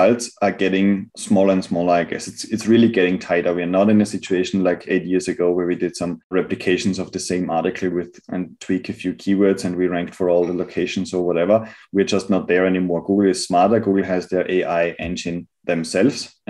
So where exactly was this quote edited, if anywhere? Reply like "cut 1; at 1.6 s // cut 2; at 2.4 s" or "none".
cut 1; at 1.1 s